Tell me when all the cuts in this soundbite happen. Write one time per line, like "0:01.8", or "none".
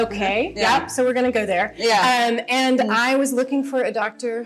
none